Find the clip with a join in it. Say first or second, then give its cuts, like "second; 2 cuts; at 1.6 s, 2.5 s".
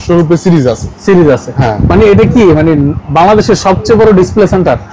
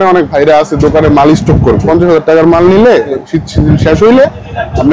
second; 2 cuts; at 1.9 s, 3.1 s